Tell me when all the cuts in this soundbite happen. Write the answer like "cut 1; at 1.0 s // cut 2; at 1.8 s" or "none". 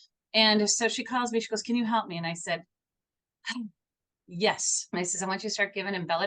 cut 1; at 4.7 s